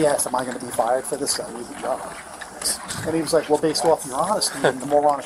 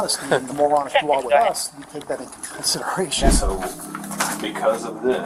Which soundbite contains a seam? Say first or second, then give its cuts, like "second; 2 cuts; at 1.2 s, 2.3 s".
second; 1 cut; at 3.3 s